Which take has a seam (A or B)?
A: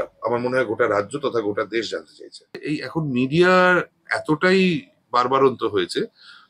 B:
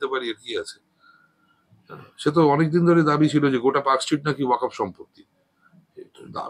A